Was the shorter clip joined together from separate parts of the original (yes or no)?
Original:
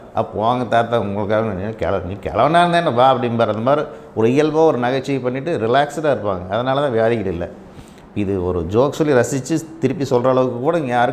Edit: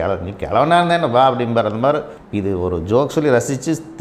yes